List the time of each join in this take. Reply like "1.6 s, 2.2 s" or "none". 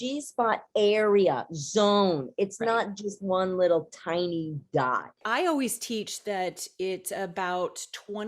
5.1 s